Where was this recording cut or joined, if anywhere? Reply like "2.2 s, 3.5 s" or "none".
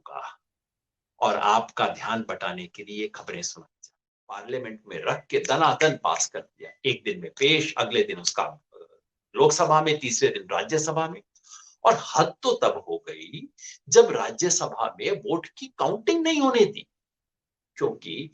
4.4 s

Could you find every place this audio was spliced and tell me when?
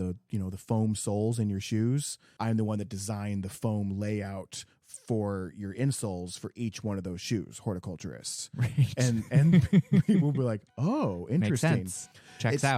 2.2 s

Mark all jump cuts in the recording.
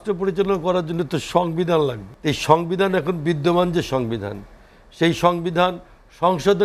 2.1 s

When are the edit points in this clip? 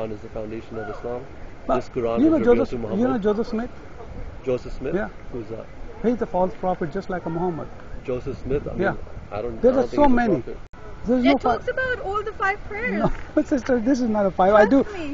10.6 s

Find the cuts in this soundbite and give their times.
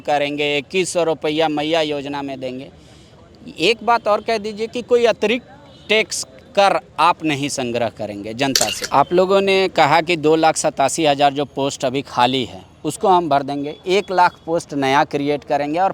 8.8 s

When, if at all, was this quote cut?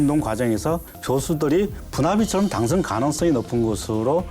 0.9 s

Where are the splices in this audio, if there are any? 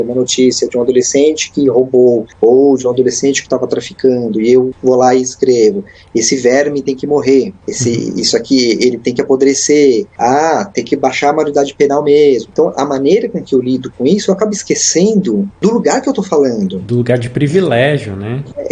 2.3 s, 4.7 s, 7.6 s, 15.5 s

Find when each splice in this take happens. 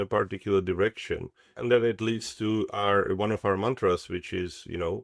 1.4 s

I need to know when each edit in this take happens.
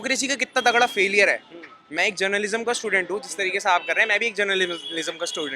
none

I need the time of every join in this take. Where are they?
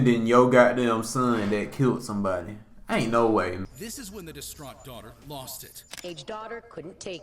3.7 s

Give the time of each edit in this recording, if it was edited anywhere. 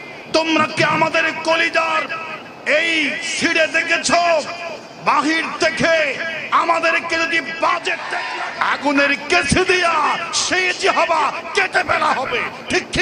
8.3 s

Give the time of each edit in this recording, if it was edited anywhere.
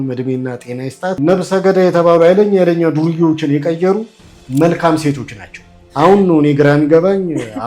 1.1 s, 5.8 s

